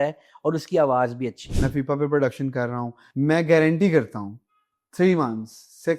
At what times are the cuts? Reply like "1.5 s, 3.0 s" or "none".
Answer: 1.4 s, 3.1 s